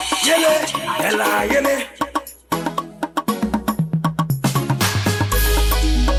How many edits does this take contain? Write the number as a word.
zero